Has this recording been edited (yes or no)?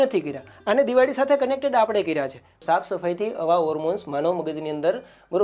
yes